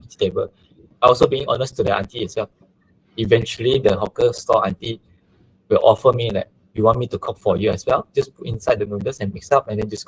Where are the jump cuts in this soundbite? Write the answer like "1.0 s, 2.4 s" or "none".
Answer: 0.9 s, 2.7 s